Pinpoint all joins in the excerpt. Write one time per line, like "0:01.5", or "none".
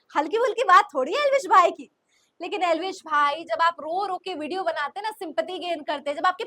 none